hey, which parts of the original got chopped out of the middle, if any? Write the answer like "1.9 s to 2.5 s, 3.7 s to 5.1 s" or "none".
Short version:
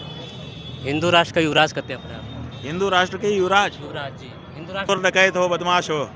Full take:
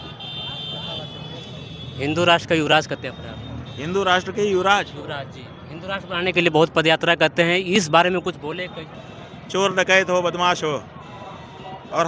6.0 s to 9.6 s